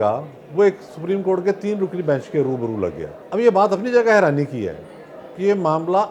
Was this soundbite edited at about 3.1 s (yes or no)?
yes